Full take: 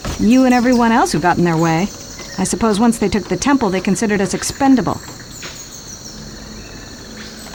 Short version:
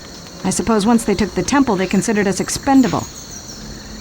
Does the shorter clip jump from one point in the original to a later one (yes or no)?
yes